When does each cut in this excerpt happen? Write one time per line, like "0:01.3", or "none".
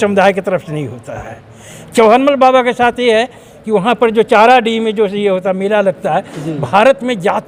none